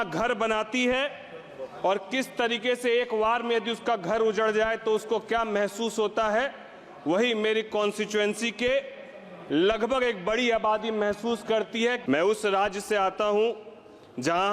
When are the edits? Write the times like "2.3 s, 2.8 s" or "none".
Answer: 12.0 s